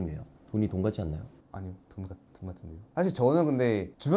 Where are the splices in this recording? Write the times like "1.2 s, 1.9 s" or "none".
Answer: 2.8 s